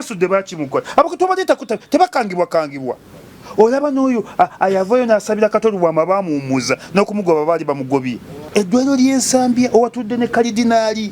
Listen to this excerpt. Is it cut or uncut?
cut